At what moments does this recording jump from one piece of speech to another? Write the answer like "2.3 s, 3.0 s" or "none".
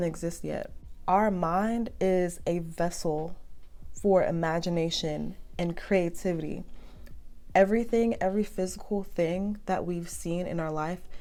none